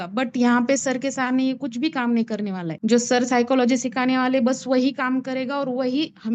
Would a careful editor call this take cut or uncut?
uncut